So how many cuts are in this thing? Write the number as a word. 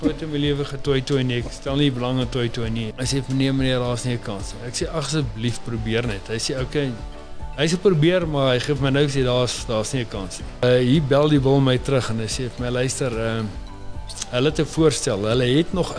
two